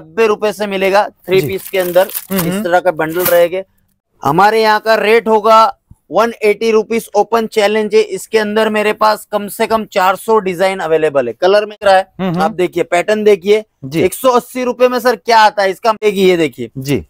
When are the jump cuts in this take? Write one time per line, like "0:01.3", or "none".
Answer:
0:03.8
0:11.7
0:16.0